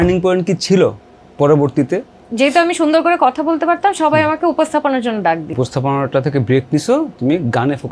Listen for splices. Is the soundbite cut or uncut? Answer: cut